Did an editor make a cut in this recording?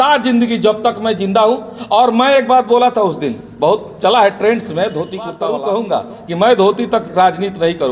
yes; 1 cut; at 5.4 s

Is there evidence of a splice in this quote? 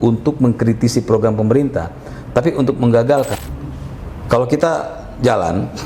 yes; 1 cut; at 3.4 s

